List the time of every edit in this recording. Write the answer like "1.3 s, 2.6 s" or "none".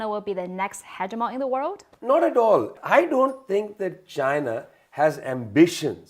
1.9 s, 2.7 s